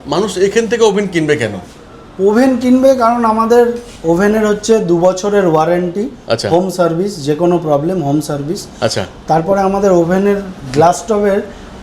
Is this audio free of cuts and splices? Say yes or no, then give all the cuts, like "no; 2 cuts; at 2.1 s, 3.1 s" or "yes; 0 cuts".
yes; 0 cuts